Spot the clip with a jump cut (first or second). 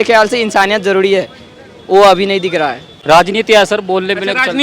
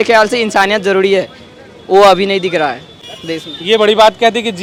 first